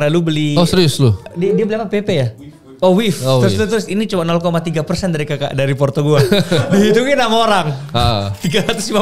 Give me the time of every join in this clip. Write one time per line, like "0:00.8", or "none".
0:01.3